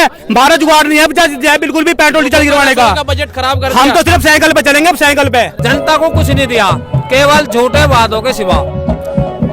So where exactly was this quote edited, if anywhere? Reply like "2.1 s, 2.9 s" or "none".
5.6 s

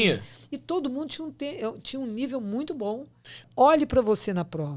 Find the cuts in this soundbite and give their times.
3.3 s

